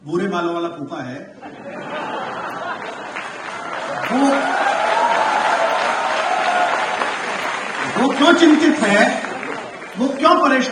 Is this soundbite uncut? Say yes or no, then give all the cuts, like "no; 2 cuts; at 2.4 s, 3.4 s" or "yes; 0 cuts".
yes; 0 cuts